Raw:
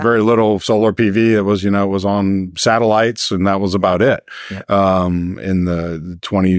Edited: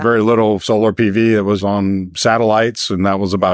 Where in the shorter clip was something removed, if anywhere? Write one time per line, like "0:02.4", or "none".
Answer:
0:01.6